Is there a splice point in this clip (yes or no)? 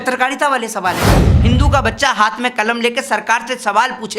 yes